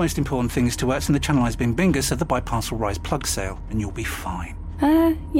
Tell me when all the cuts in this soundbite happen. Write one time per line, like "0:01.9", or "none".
none